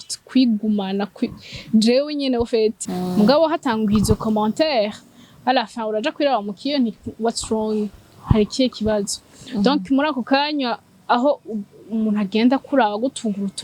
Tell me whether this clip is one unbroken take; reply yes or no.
no